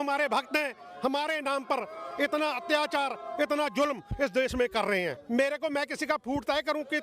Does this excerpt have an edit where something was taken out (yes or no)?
yes